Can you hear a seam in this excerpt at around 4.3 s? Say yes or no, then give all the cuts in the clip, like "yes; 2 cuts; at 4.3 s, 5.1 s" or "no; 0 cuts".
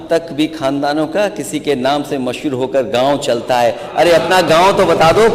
no; 0 cuts